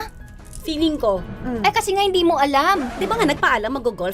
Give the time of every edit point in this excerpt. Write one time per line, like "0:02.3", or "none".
0:02.9